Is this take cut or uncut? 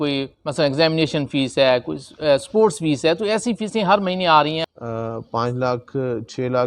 cut